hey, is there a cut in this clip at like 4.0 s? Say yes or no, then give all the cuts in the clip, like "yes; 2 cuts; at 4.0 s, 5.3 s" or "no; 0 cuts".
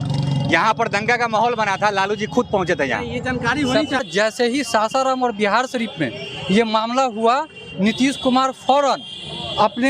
yes; 1 cut; at 4.0 s